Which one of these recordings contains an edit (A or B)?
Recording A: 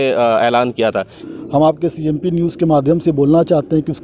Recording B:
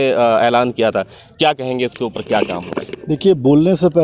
A